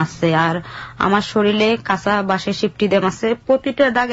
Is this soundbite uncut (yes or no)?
yes